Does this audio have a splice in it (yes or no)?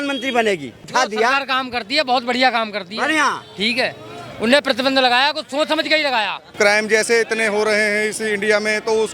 yes